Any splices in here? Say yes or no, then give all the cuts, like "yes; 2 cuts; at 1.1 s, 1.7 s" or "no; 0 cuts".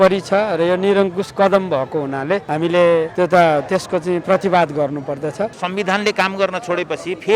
yes; 2 cuts; at 2.9 s, 5.6 s